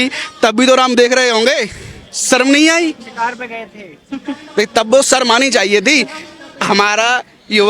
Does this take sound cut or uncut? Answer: uncut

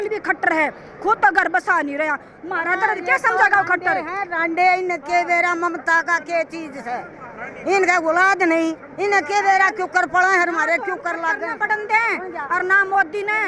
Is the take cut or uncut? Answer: uncut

